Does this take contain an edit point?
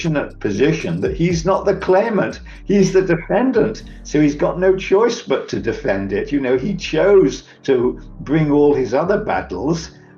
no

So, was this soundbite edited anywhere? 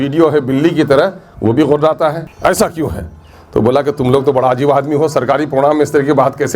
no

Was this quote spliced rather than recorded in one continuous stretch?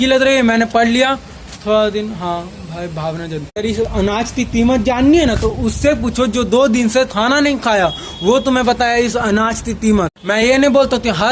yes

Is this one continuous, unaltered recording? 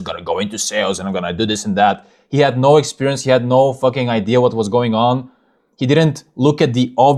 yes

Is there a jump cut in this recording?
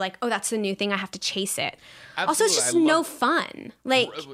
no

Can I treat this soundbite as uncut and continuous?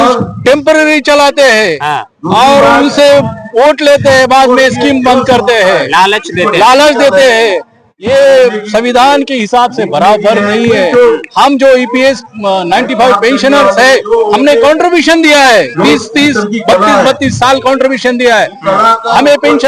yes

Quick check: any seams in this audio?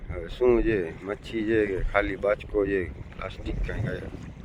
no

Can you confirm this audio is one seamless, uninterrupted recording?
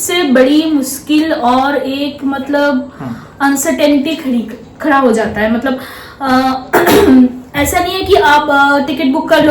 yes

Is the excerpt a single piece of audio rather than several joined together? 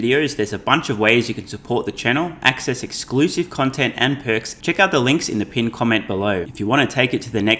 no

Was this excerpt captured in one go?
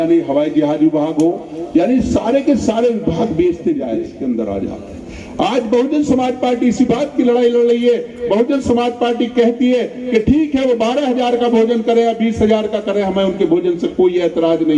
no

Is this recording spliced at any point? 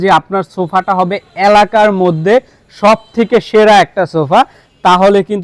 no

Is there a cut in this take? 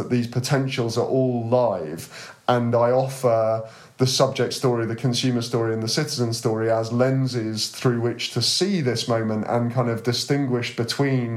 no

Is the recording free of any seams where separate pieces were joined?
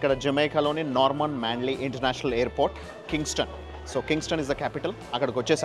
yes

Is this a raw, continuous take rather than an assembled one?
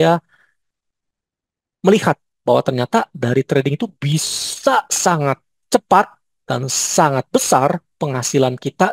yes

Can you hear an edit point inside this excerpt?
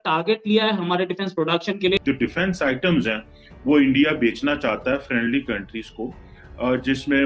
yes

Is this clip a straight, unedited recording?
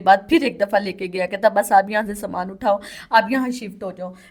yes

